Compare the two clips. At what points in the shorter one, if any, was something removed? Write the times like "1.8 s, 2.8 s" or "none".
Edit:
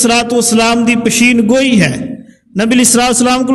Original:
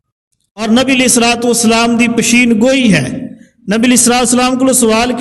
none